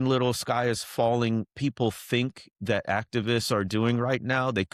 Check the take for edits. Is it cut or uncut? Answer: uncut